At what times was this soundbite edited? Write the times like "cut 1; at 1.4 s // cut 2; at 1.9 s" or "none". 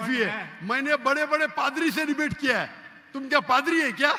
none